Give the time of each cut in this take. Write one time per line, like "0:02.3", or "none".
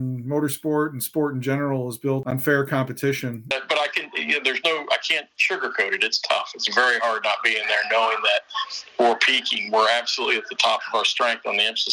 0:02.2
0:03.5